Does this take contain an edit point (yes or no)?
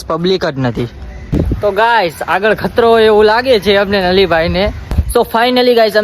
yes